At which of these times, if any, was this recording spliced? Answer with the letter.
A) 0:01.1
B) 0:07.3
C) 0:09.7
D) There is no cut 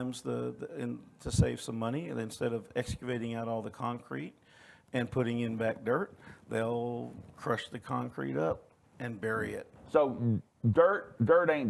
C